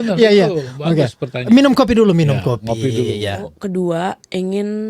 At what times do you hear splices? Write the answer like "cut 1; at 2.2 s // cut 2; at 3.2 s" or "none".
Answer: cut 1; at 3.5 s